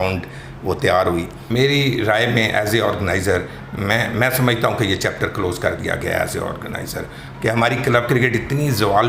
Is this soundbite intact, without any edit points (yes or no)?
no